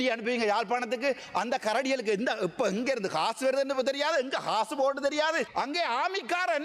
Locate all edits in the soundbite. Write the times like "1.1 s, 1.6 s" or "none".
5.5 s